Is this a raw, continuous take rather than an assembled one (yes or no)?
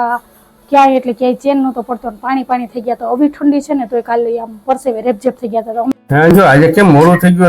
no